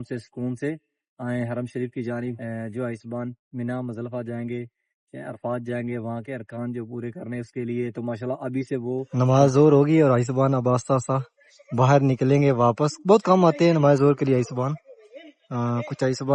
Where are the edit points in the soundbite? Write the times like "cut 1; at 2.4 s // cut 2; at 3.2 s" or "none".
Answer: cut 1; at 2.4 s // cut 2; at 9.1 s